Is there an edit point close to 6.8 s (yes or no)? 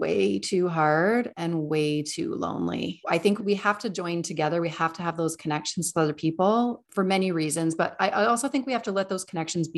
yes